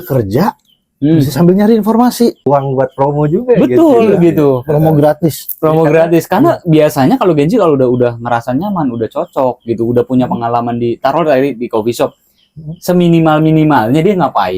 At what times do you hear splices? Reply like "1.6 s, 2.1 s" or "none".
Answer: 2.5 s